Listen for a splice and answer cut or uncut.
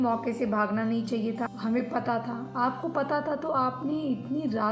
cut